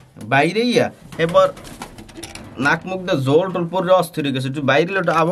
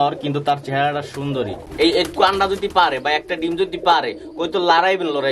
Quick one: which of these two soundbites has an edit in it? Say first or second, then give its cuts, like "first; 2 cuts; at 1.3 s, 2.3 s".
second; 1 cut; at 1.6 s